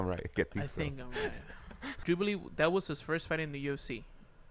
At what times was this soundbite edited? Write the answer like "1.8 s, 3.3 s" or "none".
1.9 s